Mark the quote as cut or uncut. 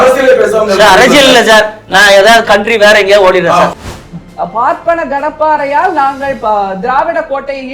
cut